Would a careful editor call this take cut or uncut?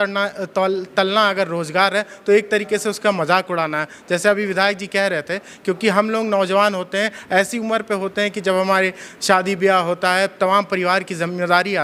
uncut